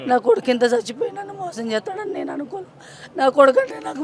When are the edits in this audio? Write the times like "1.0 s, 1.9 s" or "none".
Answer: none